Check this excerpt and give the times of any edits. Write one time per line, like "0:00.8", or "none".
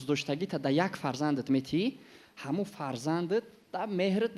none